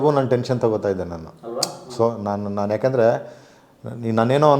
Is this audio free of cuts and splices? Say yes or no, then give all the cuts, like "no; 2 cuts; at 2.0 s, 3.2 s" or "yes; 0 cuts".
yes; 0 cuts